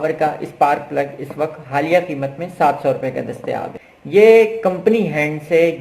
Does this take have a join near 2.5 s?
no; 1 cut; at 3.7 s

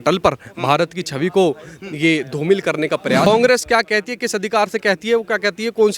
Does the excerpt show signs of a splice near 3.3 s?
yes; 1 cut; at 3.3 s

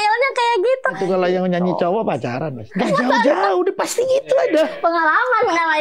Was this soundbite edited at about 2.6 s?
yes; 3 cuts; at 1.0 s, 2.6 s, 4.7 s

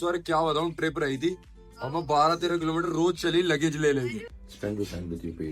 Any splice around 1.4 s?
no; 1 cut; at 4.3 s

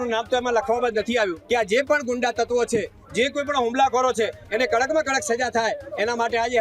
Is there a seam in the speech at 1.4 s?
yes; 1 cut; at 1.4 s

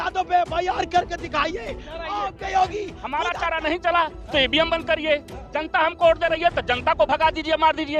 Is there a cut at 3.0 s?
yes; 1 cut; at 3.0 s

